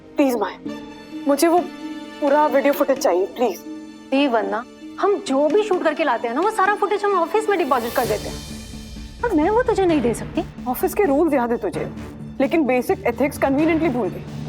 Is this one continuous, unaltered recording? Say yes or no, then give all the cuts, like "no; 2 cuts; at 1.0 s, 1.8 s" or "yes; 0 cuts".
yes; 0 cuts